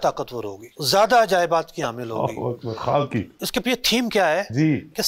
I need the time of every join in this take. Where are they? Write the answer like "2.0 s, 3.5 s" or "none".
none